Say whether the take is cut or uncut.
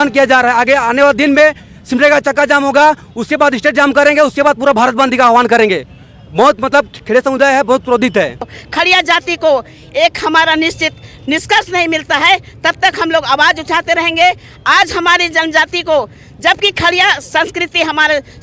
cut